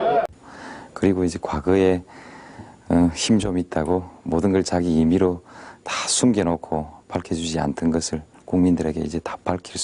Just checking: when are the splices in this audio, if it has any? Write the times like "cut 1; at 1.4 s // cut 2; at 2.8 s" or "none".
cut 1; at 8.9 s